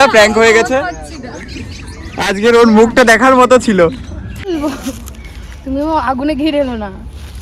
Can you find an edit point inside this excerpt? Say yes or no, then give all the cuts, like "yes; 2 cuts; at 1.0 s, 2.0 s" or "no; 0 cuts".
yes; 1 cut; at 4.5 s